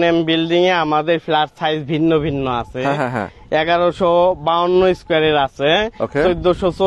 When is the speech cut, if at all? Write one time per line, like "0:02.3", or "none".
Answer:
none